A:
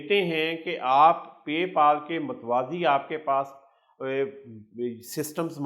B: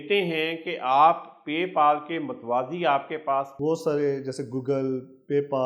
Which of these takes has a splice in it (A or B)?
B